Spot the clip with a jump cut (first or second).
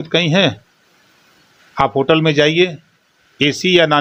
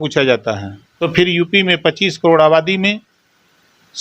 second